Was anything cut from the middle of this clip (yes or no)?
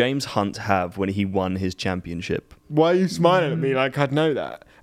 yes